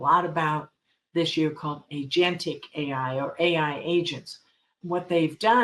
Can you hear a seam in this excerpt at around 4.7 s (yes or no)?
yes